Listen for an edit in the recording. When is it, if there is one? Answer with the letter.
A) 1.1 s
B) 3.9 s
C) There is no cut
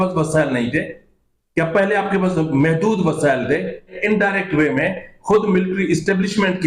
B